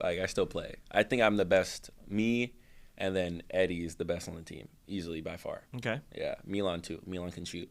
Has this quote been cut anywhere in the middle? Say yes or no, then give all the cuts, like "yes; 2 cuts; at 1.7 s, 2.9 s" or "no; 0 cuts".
no; 0 cuts